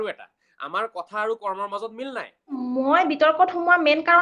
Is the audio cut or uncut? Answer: cut